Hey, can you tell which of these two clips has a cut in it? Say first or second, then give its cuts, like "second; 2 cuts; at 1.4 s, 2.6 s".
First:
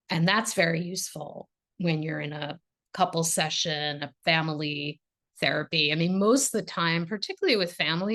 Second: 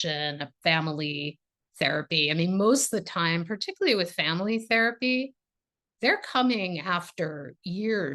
first; 1 cut; at 2.6 s